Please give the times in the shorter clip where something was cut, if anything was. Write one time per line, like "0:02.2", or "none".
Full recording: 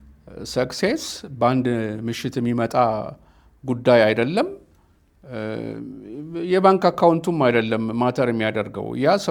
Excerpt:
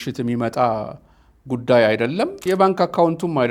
0:02.4